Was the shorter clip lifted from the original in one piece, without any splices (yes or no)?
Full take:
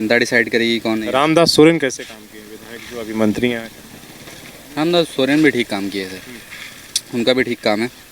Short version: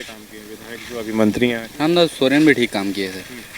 no